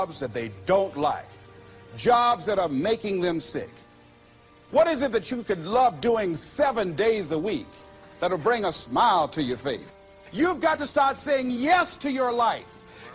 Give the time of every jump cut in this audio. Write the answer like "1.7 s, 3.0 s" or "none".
4.1 s, 10.2 s